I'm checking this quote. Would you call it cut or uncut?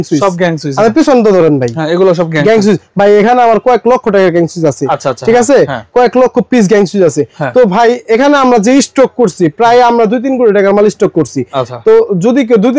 uncut